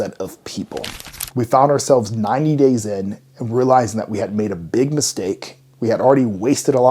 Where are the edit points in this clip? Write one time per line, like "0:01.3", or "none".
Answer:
0:00.9